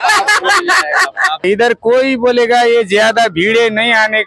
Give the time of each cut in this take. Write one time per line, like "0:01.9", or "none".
0:01.4